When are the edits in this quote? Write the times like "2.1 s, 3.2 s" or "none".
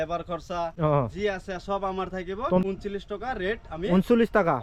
2.6 s

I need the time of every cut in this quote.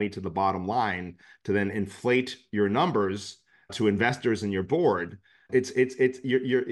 none

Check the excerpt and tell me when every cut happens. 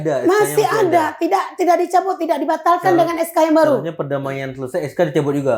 none

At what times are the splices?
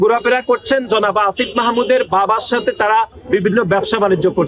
3.2 s

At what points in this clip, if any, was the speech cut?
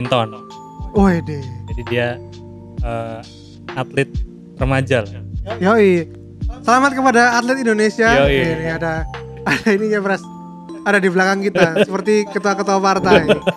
none

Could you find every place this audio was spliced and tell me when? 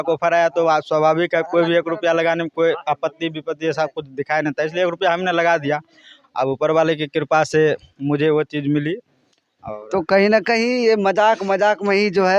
none

